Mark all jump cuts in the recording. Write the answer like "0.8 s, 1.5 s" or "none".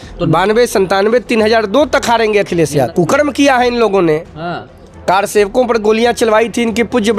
2.9 s